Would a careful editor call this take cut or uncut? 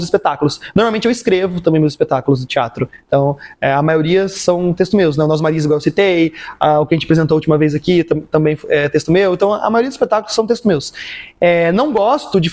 uncut